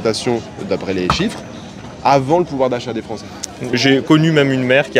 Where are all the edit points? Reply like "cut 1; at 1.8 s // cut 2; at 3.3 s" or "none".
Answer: cut 1; at 3.8 s

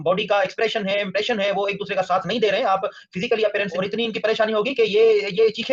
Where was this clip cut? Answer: cut 1; at 3.8 s

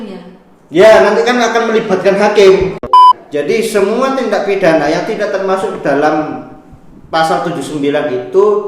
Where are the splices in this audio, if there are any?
cut 1; at 2.9 s

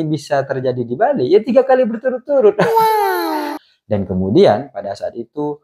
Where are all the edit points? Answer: cut 1; at 3.5 s

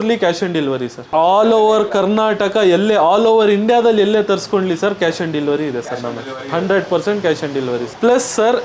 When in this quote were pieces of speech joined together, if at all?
none

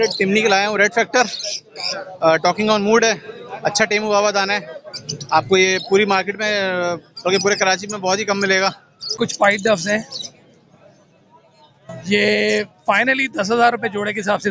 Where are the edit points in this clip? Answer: cut 1; at 9.1 s

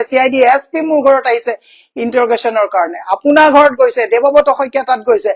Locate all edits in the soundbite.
none

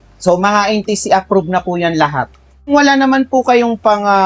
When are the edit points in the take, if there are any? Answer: cut 1; at 2.7 s

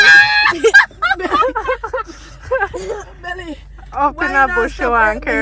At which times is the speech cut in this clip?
none

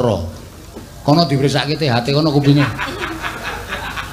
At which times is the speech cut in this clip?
none

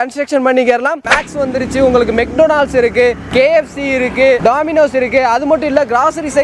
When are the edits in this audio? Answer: cut 1; at 1.1 s

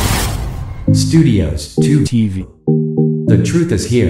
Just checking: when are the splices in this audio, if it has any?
none

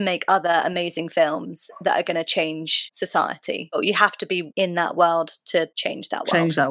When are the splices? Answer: none

